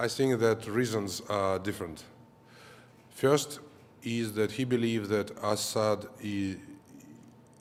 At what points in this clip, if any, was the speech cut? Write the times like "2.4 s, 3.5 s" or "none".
none